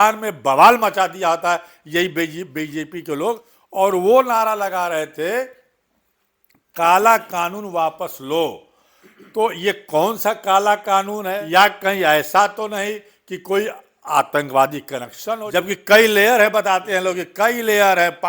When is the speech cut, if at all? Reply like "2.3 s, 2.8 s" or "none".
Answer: 3.5 s, 11.4 s, 15.4 s